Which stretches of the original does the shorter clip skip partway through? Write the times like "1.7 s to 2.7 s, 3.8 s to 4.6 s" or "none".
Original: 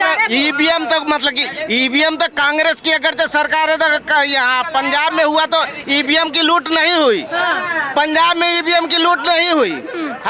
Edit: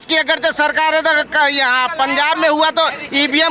none